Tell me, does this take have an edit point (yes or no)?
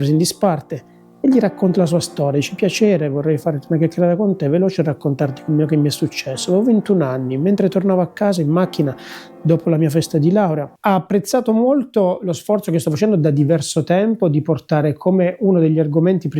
yes